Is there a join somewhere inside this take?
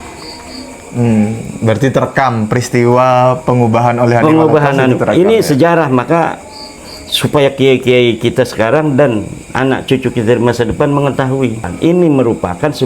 yes; 1 cut; at 11.7 s

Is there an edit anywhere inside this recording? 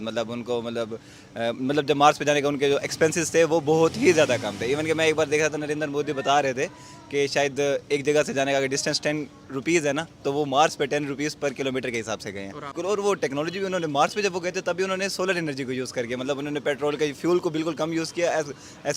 yes; 1 cut; at 12.8 s

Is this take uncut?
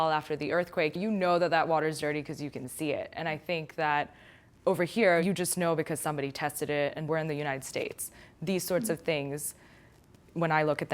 no; 3 cuts; at 1.0 s, 5.2 s, 7.1 s

